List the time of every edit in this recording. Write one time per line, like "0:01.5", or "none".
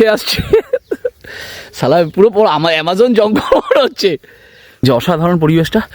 0:04.8